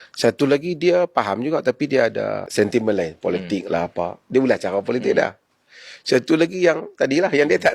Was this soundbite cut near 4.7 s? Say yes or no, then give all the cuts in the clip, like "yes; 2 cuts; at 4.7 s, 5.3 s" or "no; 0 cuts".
no; 1 cut; at 2.4 s